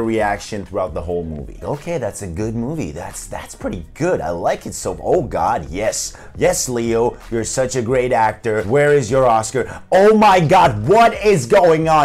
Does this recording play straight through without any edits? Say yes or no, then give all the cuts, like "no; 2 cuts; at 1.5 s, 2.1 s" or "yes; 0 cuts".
yes; 0 cuts